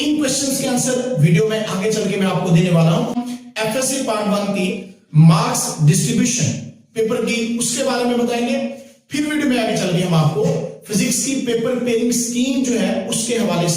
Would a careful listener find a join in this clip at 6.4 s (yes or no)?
no